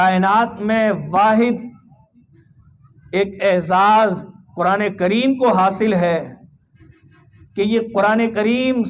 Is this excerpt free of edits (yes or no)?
yes